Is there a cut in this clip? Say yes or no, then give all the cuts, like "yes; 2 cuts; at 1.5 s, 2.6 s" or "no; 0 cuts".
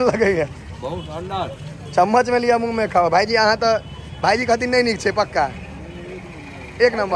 no; 0 cuts